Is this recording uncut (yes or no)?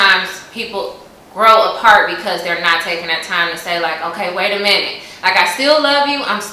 yes